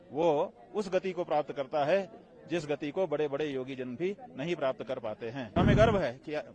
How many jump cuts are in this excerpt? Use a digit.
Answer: 1